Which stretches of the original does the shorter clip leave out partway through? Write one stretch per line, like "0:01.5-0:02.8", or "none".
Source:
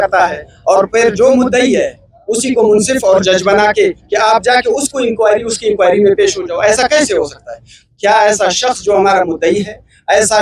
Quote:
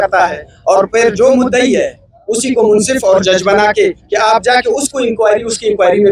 none